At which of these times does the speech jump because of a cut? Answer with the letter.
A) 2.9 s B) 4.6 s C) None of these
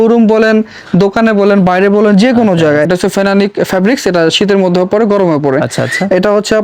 A